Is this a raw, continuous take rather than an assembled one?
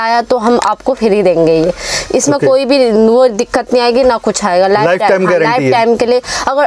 yes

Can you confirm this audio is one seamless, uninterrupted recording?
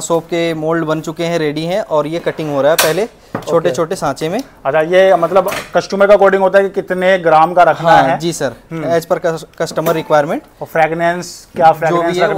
yes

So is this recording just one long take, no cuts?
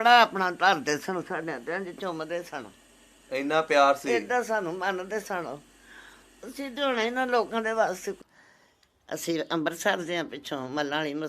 no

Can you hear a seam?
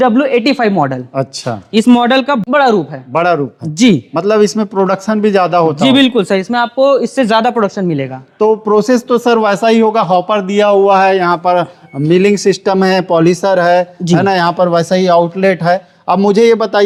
no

